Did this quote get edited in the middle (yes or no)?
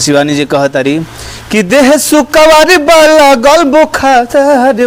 no